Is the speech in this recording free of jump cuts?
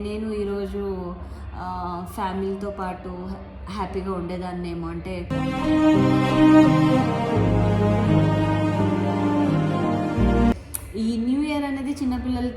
yes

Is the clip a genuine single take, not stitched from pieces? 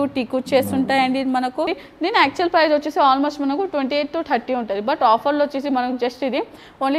no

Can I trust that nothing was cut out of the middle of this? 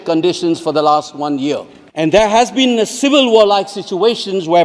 no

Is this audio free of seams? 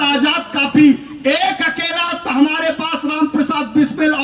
yes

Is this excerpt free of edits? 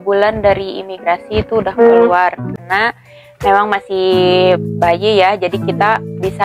no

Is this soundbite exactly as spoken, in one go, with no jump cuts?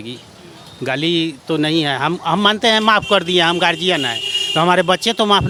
yes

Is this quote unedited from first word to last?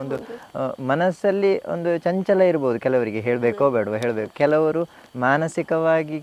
yes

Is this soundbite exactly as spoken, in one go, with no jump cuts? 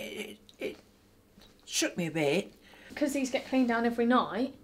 no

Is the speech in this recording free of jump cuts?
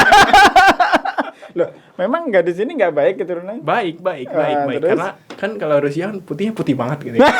yes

